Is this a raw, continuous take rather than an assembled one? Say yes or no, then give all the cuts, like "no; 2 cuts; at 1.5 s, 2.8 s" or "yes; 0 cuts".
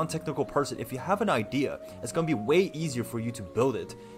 yes; 0 cuts